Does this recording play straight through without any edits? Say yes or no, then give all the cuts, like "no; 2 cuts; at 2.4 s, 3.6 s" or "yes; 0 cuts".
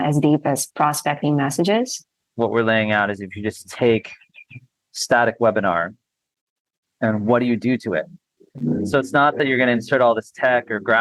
no; 1 cut; at 2.2 s